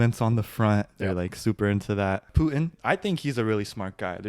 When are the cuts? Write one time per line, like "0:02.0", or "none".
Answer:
0:02.6